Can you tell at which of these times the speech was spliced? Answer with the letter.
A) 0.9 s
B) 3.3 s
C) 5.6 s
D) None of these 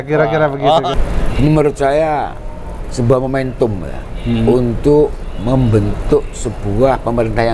A